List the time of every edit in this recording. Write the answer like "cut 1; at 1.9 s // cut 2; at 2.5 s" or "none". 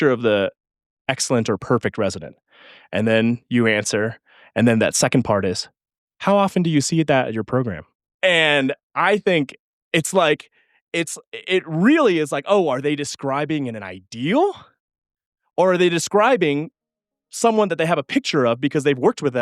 cut 1; at 7.8 s